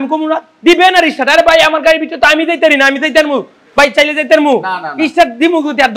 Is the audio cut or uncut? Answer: uncut